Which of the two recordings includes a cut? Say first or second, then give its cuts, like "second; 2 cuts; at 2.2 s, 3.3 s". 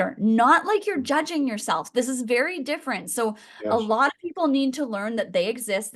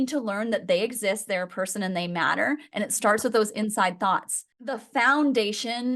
second; 1 cut; at 4.8 s